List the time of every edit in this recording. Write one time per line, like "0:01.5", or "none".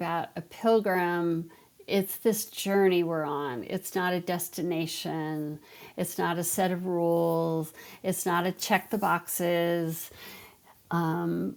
none

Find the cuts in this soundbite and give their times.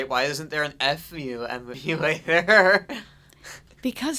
0:01.7

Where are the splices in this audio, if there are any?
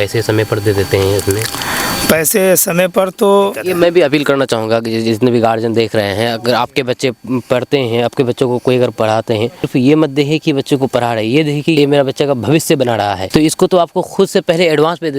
0:03.6
0:09.6
0:11.8
0:13.2

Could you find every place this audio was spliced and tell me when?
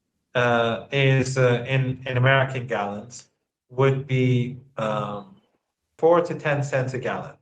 0:05.9

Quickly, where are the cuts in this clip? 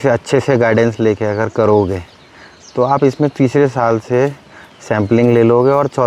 none

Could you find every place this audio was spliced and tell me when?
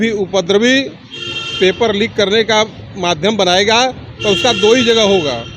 none

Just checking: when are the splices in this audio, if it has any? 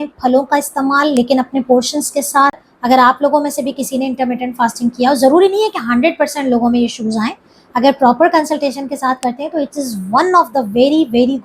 0:02.7

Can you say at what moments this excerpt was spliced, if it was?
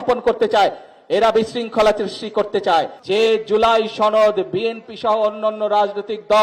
0:03.0

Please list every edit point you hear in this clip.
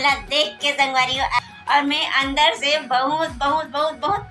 0:01.4

